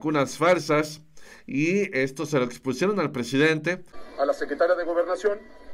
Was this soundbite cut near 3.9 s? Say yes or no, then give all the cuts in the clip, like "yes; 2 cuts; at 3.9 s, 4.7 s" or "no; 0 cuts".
yes; 1 cut; at 3.9 s